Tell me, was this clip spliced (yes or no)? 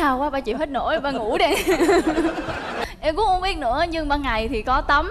yes